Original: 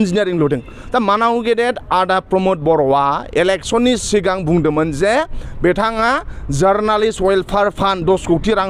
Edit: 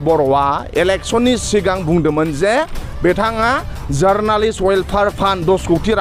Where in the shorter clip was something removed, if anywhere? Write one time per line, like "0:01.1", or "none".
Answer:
none